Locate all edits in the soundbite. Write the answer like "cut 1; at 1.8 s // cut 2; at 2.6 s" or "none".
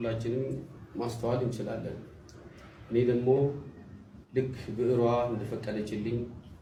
none